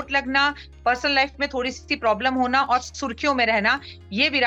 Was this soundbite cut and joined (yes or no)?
no